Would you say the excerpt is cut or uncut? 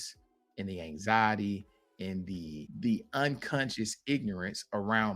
cut